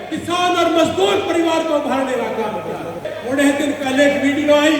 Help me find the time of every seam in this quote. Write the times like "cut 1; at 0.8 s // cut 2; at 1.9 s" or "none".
cut 1; at 3.1 s

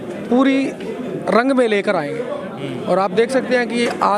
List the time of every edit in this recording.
none

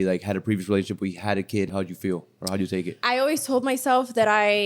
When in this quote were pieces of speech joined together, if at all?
cut 1; at 1.7 s // cut 2; at 2.9 s

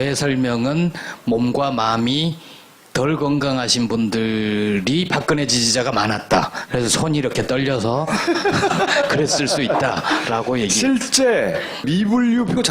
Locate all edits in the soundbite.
cut 1; at 7.0 s

